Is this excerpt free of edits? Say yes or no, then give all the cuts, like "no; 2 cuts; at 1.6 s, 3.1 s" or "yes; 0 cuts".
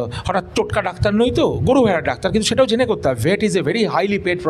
yes; 0 cuts